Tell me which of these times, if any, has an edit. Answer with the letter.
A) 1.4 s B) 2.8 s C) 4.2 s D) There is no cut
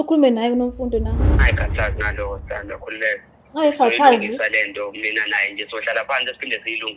A